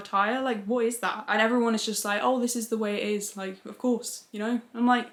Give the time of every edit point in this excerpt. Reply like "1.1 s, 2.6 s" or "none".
none